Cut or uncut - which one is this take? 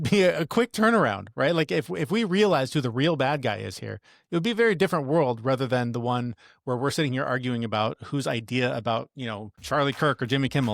cut